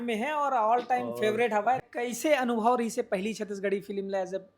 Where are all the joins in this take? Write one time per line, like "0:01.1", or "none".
0:01.8

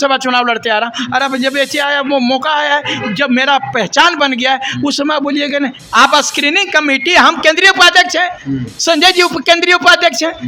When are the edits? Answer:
0:05.8

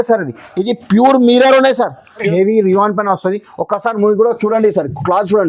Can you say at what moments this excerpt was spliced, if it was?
0:02.3

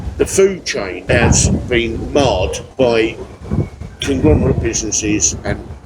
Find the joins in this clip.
0:01.0
0:02.6

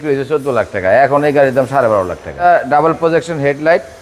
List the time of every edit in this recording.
0:02.4

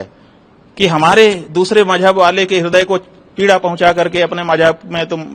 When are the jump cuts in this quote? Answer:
none

